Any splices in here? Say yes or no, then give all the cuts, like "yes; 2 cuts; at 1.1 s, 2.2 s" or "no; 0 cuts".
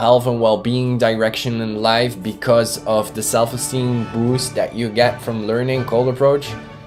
no; 0 cuts